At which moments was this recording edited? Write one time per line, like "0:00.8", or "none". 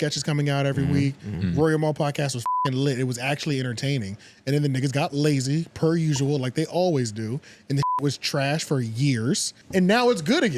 0:09.5